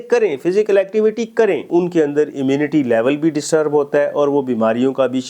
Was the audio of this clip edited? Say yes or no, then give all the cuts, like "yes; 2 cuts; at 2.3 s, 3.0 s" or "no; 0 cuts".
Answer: yes; 1 cut; at 1.7 s